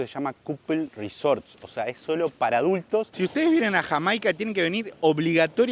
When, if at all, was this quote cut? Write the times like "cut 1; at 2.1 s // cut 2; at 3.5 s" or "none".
cut 1; at 3.1 s